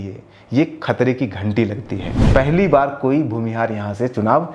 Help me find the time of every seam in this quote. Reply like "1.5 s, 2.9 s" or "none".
2.1 s